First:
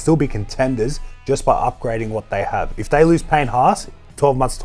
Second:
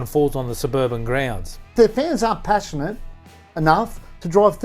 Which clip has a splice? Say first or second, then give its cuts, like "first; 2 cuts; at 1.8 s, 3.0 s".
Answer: second; 1 cut; at 1.7 s